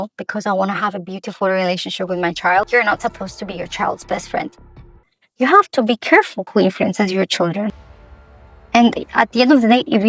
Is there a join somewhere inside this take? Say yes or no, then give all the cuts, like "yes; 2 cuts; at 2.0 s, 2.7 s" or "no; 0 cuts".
yes; 3 cuts; at 2.7 s, 5.1 s, 7.8 s